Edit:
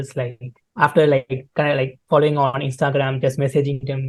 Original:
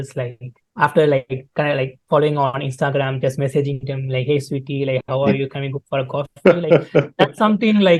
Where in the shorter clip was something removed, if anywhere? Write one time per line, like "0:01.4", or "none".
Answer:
none